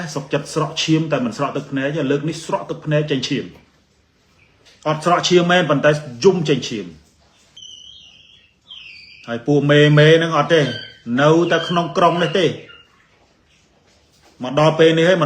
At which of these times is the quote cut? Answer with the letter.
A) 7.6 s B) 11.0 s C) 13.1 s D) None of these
A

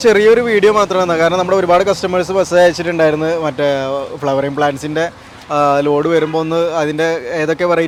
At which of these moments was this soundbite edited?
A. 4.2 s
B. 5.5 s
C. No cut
C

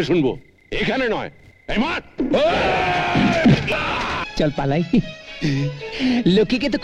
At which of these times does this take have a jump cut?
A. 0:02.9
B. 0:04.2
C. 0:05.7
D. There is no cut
B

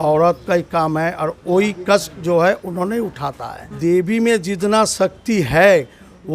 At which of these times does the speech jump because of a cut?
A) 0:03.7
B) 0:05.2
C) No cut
A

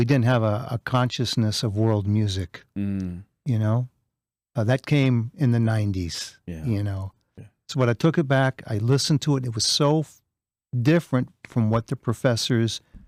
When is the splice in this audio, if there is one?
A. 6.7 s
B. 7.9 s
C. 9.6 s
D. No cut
D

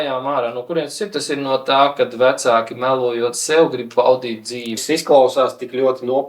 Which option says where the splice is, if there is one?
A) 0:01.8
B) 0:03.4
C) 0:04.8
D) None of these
C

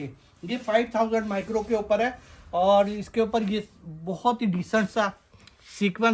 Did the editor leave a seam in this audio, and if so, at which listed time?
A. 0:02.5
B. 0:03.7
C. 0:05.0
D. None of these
D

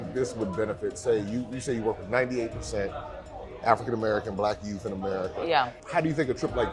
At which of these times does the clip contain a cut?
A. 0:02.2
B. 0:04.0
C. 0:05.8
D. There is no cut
C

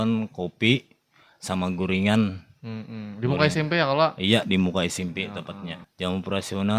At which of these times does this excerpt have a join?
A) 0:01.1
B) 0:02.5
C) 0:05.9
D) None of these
C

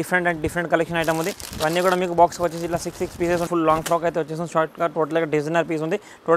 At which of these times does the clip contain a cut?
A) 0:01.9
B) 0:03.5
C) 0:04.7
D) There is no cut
B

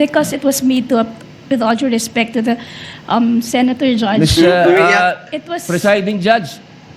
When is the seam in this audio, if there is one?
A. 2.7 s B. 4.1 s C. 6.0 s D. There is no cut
D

